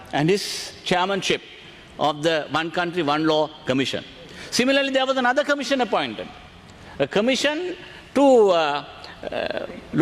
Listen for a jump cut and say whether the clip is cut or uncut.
uncut